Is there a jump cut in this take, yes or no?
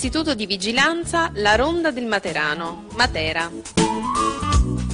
yes